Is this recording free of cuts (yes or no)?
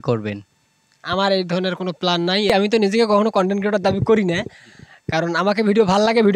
no